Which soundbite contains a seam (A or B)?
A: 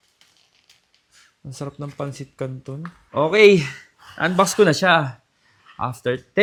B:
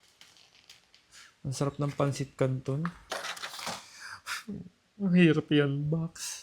B